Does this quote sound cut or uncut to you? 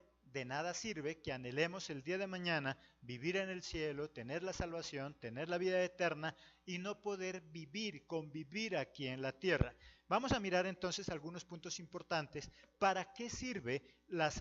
cut